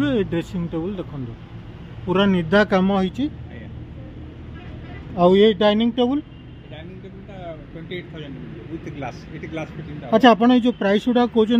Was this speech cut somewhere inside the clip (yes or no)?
no